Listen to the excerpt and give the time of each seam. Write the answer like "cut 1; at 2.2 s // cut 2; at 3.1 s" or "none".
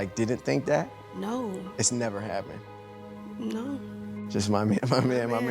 cut 1; at 3.8 s